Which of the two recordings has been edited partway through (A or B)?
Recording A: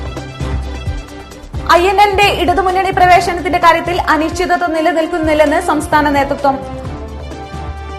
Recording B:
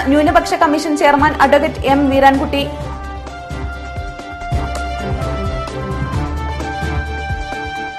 A